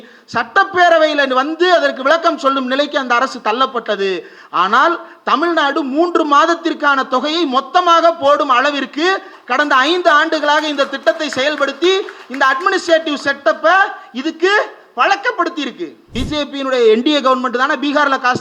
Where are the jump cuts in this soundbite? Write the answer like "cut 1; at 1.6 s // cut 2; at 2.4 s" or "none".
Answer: cut 1; at 16.1 s